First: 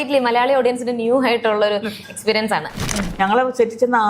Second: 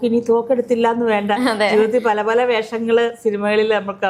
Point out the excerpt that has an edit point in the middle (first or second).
first